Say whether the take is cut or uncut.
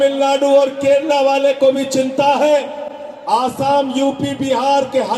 uncut